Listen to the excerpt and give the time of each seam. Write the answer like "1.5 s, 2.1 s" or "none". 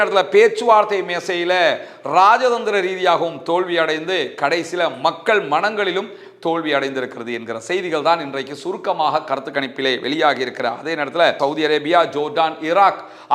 11.4 s

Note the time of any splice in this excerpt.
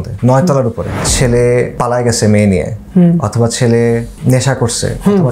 1.0 s, 1.7 s, 4.1 s

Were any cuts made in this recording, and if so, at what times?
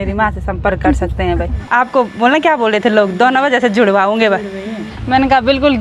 1.5 s, 4.8 s

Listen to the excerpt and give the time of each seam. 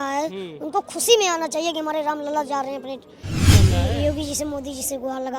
3.5 s

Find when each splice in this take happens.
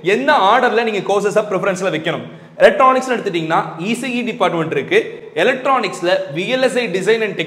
none

